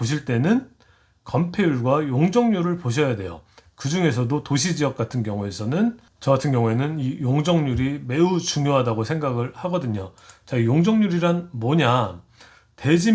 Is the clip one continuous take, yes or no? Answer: yes